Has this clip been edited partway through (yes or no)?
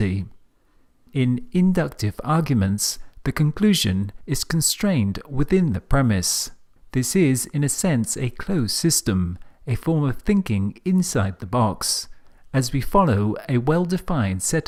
no